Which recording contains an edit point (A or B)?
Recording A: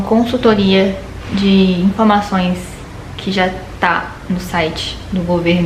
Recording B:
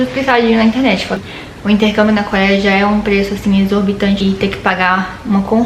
B